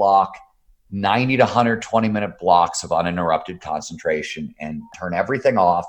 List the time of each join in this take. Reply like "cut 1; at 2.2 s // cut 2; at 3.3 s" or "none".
cut 1; at 5.0 s